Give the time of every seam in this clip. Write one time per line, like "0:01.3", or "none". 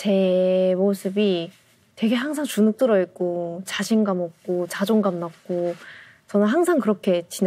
none